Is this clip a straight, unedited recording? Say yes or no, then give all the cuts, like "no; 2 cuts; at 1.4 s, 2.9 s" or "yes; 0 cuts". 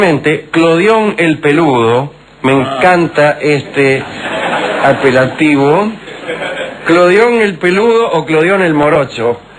no; 1 cut; at 4.6 s